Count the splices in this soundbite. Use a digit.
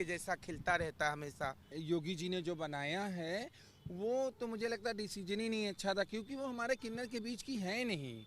1